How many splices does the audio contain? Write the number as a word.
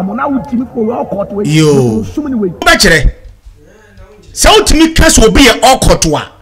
one